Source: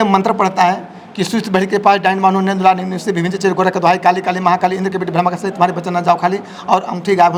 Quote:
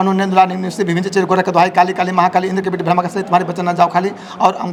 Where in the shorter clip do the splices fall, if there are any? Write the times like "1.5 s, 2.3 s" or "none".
none